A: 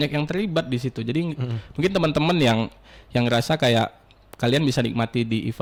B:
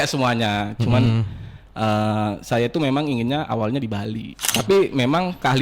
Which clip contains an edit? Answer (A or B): B